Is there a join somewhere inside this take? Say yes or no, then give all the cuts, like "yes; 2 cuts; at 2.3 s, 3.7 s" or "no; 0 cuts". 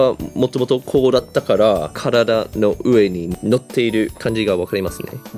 yes; 4 cuts; at 0.8 s, 1.9 s, 3.3 s, 4.2 s